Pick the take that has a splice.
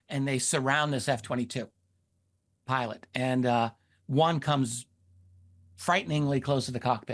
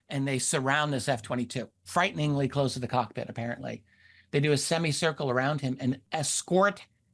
second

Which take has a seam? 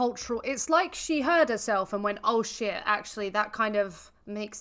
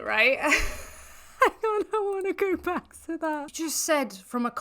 second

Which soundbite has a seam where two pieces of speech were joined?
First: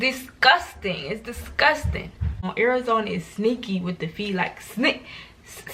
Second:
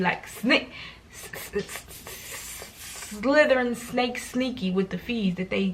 first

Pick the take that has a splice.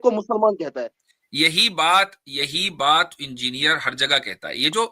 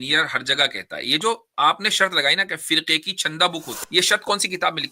second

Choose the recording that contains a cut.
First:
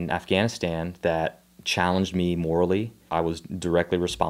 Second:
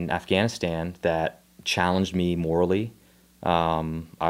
first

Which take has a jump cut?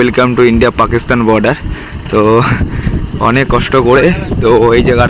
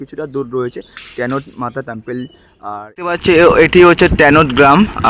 second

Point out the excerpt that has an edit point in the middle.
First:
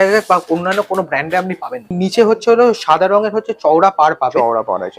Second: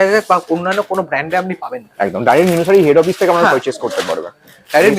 first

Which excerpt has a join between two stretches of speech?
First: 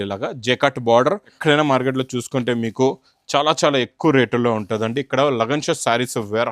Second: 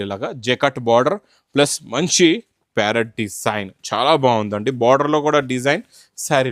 first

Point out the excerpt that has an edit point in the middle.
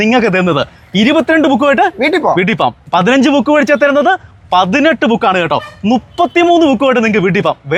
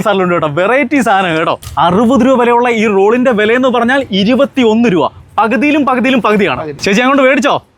second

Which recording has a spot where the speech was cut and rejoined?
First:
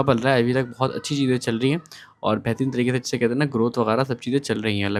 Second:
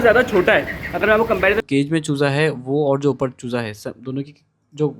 second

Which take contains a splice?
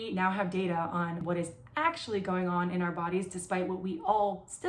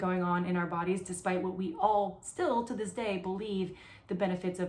first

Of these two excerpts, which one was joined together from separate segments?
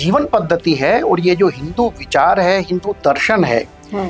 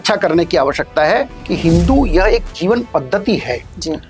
second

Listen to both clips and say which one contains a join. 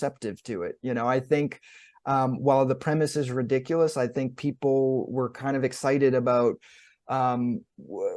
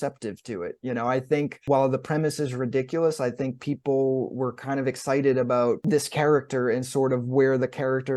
second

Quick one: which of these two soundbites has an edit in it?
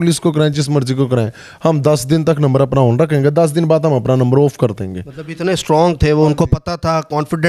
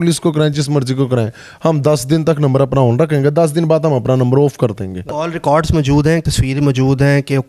second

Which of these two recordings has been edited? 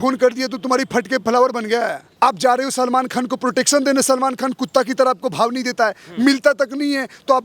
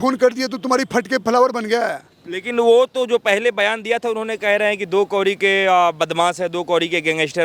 first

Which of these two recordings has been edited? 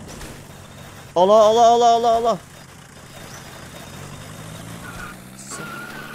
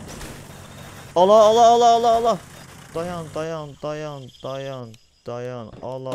second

